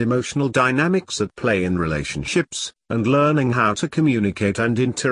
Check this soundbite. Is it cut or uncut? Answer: cut